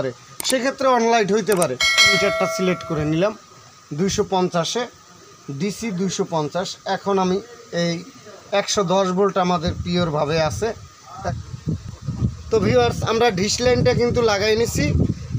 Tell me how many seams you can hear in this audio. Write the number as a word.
two